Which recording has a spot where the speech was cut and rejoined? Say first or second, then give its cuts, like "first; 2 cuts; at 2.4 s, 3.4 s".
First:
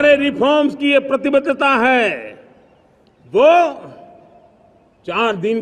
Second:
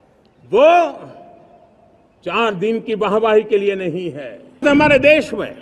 second; 1 cut; at 4.6 s